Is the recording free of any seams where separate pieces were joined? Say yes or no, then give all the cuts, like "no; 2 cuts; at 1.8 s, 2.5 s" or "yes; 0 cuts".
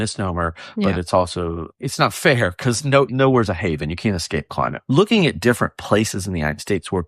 no; 3 cuts; at 1.7 s, 3.1 s, 4.8 s